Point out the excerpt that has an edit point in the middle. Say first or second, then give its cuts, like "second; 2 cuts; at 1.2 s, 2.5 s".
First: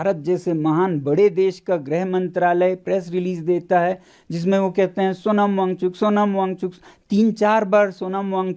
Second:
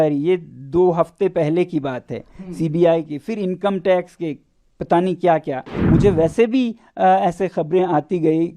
second; 1 cut; at 5.7 s